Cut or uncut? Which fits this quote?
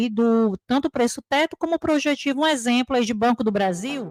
uncut